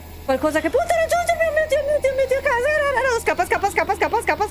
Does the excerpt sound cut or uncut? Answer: uncut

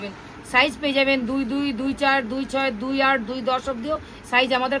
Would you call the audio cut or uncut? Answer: uncut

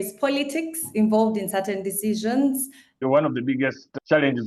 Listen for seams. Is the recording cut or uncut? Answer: cut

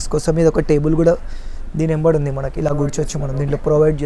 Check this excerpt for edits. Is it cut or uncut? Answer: uncut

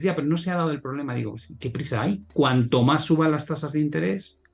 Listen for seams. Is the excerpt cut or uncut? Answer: cut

